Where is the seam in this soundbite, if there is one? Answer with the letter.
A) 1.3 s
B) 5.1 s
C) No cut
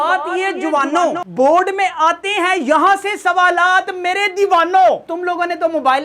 B